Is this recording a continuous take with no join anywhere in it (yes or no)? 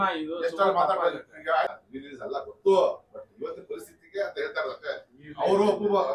no